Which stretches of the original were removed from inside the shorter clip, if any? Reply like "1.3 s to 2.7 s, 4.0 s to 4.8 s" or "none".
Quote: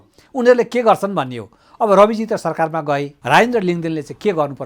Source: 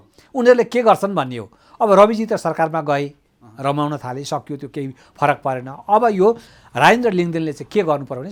3.1 s to 6.6 s